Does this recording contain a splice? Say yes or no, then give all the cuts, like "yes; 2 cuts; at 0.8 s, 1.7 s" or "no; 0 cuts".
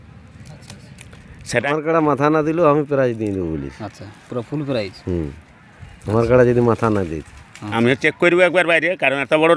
yes; 2 cuts; at 1.7 s, 7.6 s